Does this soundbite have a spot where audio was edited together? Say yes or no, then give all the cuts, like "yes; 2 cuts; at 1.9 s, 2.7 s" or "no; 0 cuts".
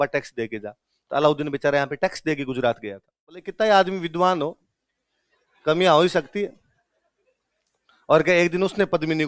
yes; 1 cut; at 3.5 s